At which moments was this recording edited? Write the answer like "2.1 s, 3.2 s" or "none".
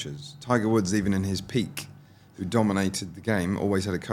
none